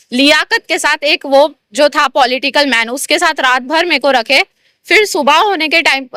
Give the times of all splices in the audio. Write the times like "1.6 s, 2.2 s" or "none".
none